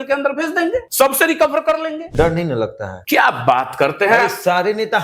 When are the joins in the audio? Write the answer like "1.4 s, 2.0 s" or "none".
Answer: 0.9 s, 2.1 s, 2.9 s